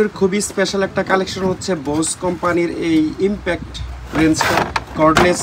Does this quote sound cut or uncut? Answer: uncut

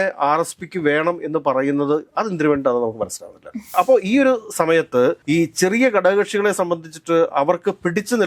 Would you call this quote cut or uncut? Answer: cut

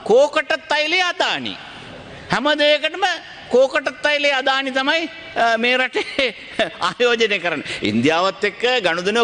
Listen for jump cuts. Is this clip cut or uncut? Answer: uncut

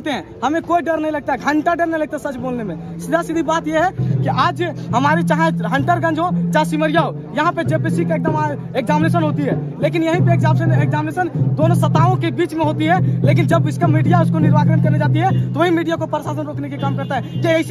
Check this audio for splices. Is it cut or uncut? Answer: uncut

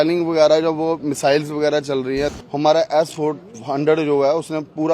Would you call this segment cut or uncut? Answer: cut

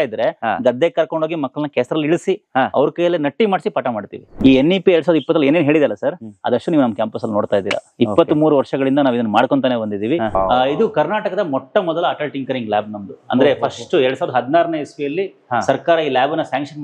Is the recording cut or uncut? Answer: cut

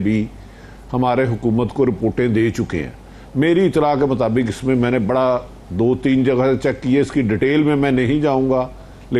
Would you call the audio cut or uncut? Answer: uncut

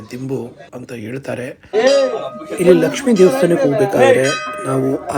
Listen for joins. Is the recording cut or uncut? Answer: cut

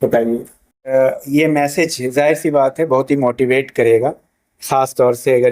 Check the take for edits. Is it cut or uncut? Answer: cut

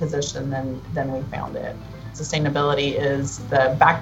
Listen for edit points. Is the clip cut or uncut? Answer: cut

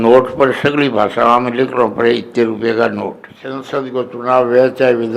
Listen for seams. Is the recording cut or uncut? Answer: cut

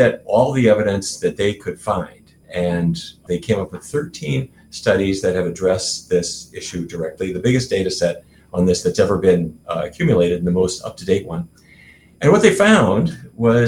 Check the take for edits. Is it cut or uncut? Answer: cut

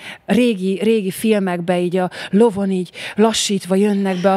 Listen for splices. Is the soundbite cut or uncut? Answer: uncut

